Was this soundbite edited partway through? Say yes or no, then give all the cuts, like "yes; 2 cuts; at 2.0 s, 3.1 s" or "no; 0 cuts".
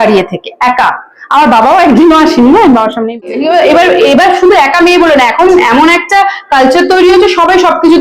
yes; 1 cut; at 3.2 s